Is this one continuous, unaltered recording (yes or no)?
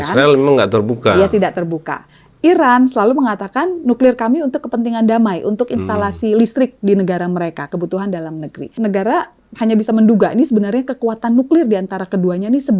no